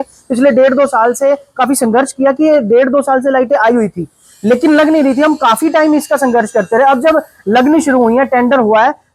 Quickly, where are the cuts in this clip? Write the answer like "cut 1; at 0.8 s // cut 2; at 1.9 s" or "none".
none